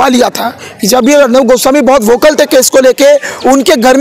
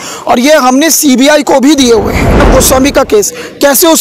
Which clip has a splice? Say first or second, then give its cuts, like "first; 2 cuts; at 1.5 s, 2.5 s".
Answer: second; 1 cut; at 2.5 s